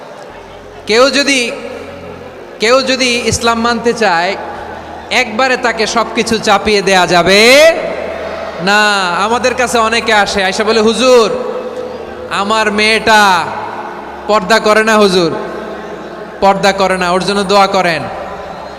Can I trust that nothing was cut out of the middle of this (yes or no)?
yes